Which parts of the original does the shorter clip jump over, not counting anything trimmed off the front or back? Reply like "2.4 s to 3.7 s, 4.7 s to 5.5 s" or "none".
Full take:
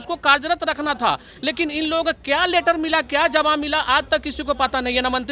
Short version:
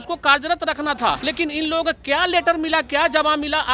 1.2 s to 1.4 s